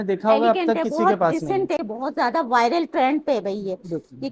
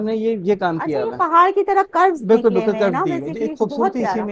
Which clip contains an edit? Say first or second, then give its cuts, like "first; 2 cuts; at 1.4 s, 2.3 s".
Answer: first; 1 cut; at 1.8 s